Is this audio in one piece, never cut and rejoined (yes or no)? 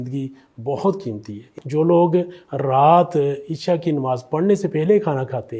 no